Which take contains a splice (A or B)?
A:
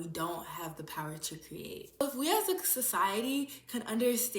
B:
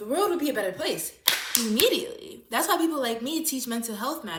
A